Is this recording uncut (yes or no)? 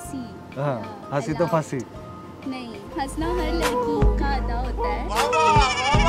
yes